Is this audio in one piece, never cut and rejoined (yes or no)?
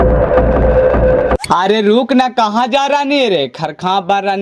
no